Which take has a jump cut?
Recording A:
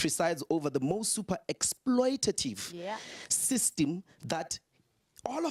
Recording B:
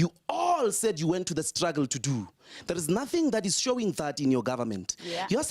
B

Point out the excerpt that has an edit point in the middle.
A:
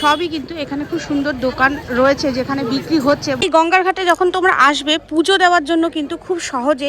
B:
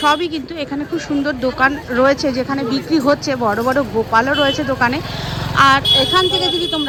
A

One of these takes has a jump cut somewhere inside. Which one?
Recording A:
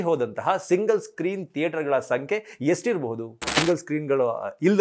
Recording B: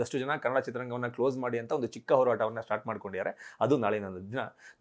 A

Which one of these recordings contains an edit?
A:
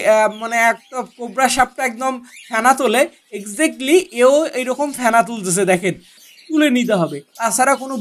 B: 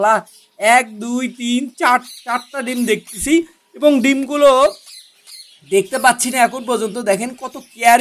A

